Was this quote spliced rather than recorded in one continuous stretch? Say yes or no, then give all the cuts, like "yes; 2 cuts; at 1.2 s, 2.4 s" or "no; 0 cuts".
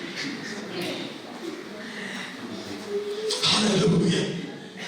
no; 0 cuts